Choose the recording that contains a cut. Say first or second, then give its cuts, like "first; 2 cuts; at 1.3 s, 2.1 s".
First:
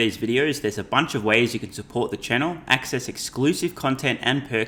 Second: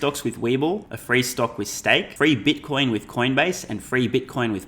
second; 2 cuts; at 0.9 s, 2.1 s